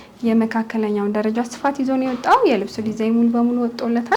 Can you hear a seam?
no; 0 cuts

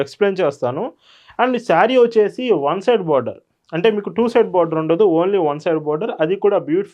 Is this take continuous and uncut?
yes; 0 cuts

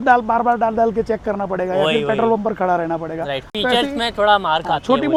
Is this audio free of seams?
yes; 0 cuts

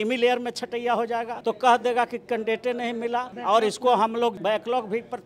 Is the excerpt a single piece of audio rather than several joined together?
no; 3 cuts; at 1.3 s, 3.3 s, 4.4 s

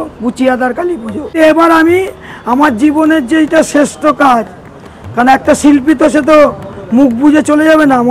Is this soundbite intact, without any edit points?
no; 1 cut; at 1.4 s

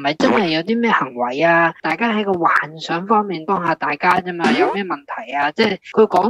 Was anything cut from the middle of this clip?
no; 0 cuts

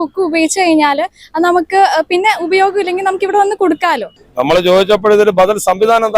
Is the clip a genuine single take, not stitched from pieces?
no; 1 cut; at 4.1 s

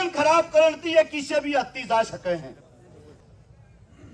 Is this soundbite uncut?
no; 1 cut; at 3.1 s

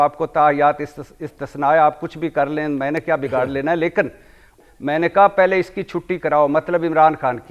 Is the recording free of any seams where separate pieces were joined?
no; 1 cut; at 4.6 s

